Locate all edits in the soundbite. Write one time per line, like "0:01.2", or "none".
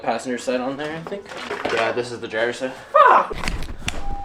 0:01.4
0:03.3